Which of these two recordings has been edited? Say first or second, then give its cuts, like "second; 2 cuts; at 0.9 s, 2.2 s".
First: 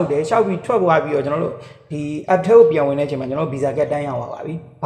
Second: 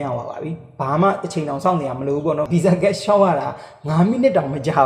second; 1 cut; at 2.5 s